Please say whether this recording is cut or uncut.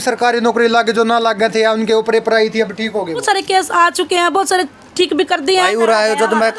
cut